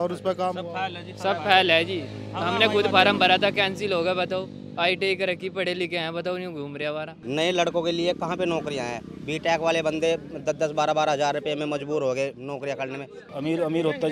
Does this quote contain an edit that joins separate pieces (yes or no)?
yes